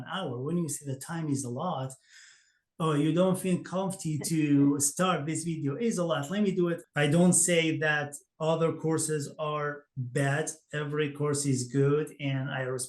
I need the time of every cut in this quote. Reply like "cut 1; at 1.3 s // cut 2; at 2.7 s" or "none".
cut 1; at 6.9 s